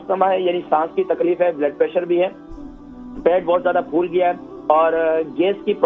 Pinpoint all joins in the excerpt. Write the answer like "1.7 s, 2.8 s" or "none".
none